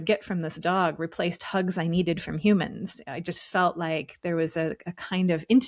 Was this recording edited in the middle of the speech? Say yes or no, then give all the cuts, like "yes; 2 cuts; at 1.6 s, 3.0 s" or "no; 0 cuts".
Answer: no; 0 cuts